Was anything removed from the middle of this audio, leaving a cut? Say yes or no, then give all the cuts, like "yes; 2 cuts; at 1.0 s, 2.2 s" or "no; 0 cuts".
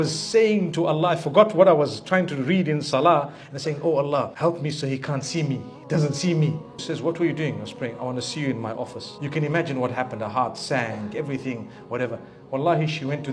yes; 3 cuts; at 4.3 s, 6.9 s, 9.0 s